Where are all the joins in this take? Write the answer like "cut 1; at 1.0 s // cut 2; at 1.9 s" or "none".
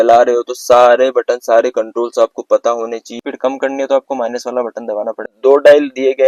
cut 1; at 3.3 s // cut 2; at 5.3 s